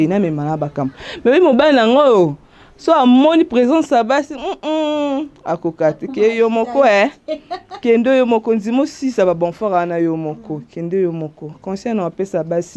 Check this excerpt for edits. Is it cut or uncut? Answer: uncut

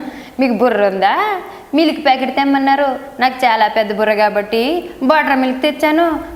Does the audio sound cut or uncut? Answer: uncut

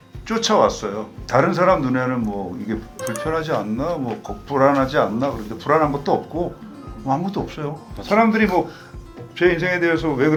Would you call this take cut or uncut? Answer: uncut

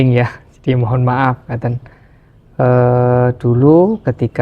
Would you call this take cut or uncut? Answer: uncut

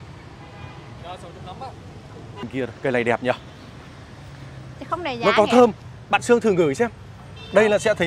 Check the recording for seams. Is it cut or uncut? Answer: cut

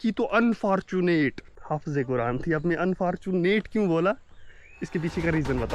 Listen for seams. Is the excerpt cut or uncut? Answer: cut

